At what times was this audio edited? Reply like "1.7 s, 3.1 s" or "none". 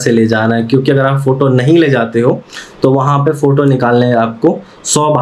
none